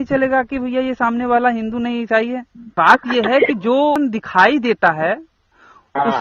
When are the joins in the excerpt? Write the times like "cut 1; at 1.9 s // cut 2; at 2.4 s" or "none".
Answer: cut 1; at 2.6 s // cut 2; at 4.0 s